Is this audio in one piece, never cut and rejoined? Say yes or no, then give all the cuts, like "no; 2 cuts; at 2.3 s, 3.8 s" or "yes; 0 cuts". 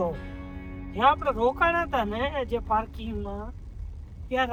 yes; 0 cuts